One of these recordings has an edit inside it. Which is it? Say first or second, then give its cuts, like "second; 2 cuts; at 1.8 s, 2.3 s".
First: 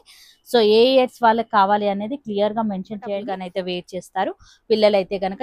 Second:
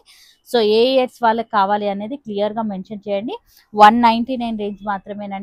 first; 1 cut; at 3.4 s